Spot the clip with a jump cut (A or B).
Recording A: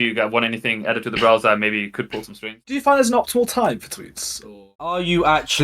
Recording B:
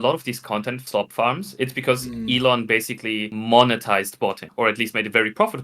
A